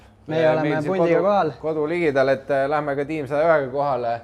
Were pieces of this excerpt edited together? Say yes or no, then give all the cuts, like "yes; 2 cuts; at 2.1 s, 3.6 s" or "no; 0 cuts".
no; 0 cuts